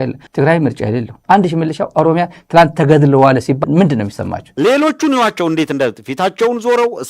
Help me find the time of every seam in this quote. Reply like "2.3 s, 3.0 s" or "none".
1.2 s, 4.4 s